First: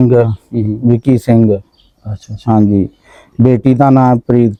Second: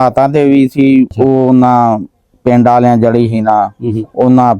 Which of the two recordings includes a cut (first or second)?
second